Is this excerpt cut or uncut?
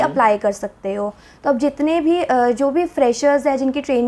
uncut